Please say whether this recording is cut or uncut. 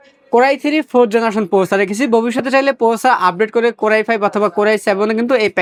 uncut